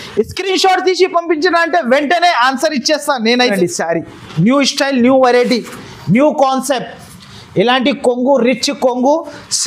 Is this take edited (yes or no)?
yes